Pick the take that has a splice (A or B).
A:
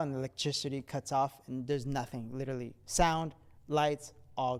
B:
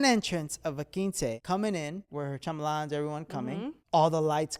B